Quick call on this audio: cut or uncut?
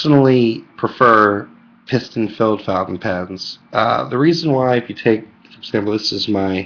cut